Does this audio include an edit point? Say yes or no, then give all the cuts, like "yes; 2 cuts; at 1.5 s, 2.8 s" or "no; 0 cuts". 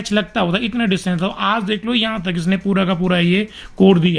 no; 0 cuts